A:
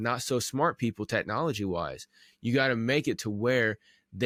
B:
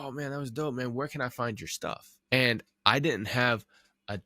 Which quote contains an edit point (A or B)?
B